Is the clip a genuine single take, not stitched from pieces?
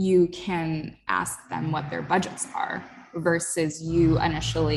yes; 0 cuts

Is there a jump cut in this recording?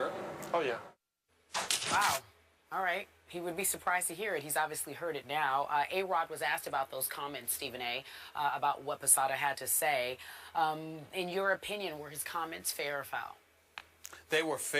yes; 1 cut; at 7.5 s

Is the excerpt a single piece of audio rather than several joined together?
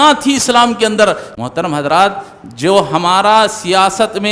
no; 1 cut; at 1.3 s

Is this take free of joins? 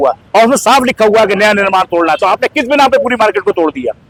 yes; 0 cuts

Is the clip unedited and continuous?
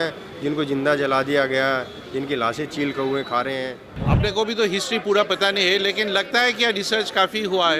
no; 1 cut; at 3.9 s

